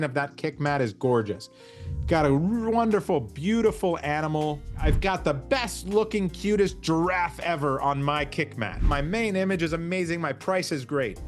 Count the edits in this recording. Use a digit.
2